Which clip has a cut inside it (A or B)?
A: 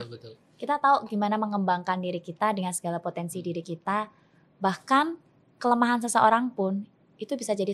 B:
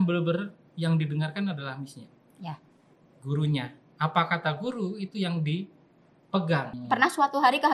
B